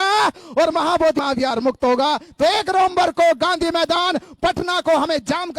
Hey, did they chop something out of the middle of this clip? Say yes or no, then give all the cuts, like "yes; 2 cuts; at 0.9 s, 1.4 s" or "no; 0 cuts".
yes; 1 cut; at 1.2 s